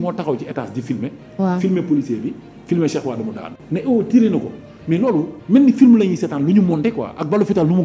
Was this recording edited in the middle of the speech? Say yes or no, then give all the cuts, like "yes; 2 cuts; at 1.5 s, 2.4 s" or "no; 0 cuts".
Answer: no; 0 cuts